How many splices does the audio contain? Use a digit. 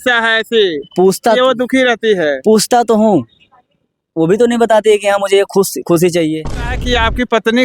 1